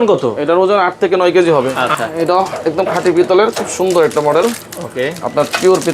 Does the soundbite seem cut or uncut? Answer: cut